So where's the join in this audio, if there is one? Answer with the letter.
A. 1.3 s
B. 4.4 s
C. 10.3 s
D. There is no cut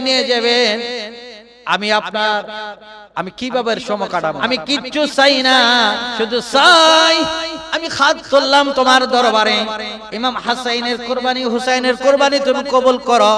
B